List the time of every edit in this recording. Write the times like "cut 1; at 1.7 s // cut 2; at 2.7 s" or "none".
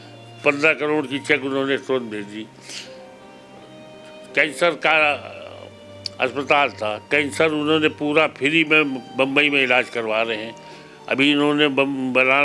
none